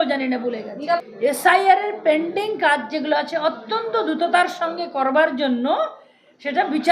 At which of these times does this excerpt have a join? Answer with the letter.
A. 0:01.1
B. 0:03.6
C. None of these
A